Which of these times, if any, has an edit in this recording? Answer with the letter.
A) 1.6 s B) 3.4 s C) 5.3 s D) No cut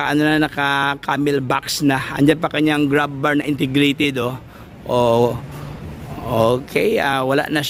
D